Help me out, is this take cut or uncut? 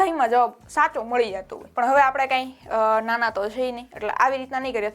cut